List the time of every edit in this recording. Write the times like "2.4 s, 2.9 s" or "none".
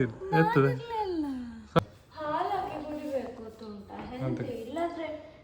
1.8 s